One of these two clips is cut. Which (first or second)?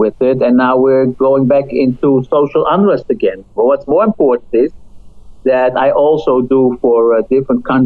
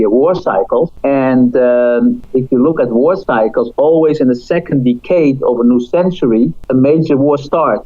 second